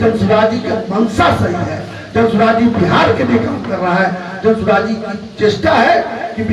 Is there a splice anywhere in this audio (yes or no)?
no